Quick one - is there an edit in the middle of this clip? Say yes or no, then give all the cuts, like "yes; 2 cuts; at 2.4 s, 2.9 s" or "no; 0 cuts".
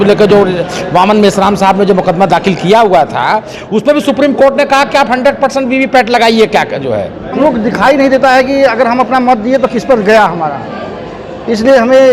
yes; 1 cut; at 7.4 s